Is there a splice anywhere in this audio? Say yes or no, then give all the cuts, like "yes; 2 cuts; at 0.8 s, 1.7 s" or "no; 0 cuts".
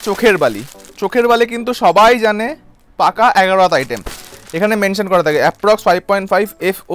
no; 0 cuts